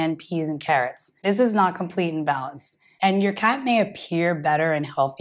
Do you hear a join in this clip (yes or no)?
yes